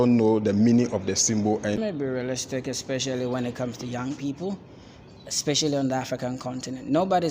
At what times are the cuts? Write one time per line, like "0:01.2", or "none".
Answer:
0:01.8